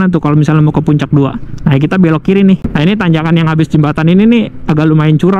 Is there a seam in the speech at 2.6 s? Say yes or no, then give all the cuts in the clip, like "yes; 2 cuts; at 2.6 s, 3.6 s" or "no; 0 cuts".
yes; 1 cut; at 2.6 s